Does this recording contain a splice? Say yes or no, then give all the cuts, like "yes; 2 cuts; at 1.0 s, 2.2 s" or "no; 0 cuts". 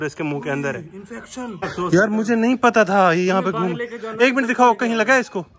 yes; 1 cut; at 1.7 s